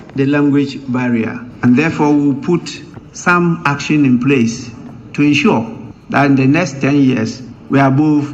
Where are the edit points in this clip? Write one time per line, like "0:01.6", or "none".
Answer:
0:01.4